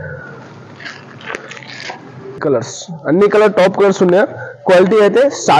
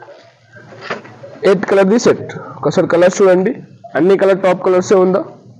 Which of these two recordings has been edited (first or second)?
first